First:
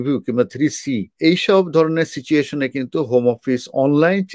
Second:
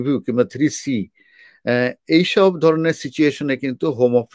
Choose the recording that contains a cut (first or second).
first